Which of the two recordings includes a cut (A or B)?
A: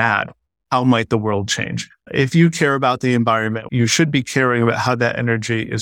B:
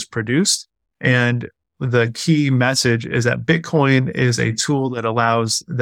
A